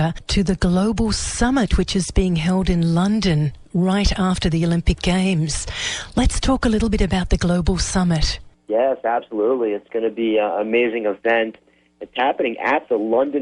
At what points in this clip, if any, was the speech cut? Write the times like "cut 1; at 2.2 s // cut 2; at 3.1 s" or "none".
none

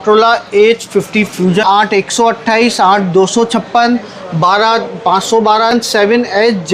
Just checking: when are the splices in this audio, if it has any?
cut 1; at 1.6 s // cut 2; at 5.7 s

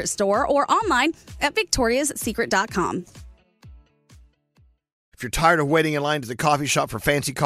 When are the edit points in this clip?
cut 1; at 5.0 s

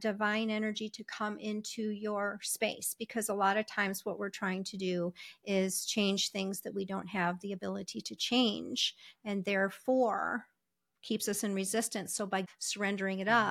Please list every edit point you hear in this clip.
cut 1; at 12.5 s

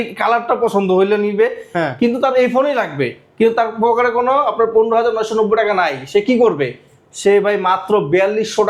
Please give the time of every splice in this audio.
none

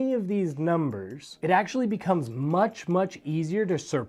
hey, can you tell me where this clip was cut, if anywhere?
none

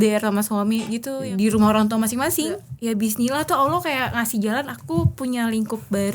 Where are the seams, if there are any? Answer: cut 1; at 1.2 s // cut 2; at 2.7 s

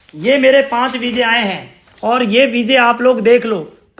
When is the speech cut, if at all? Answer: none

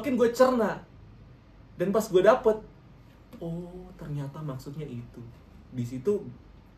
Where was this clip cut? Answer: none

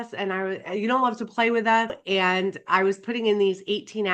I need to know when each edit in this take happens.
cut 1; at 1.9 s

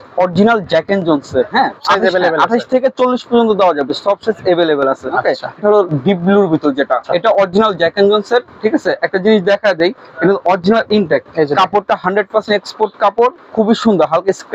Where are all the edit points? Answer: cut 1; at 1.8 s // cut 2; at 5.6 s // cut 3; at 7.0 s // cut 4; at 11.3 s

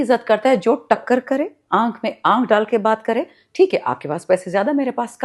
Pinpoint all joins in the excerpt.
none

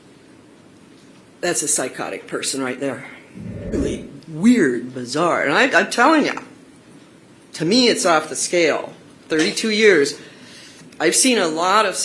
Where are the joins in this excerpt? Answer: cut 1; at 3.8 s

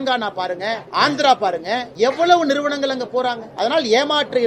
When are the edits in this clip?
cut 1; at 0.8 s // cut 2; at 1.9 s // cut 3; at 3.5 s

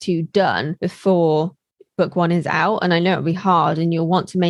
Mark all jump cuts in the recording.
none

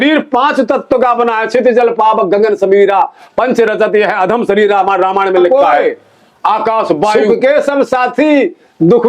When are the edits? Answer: cut 1; at 7.1 s

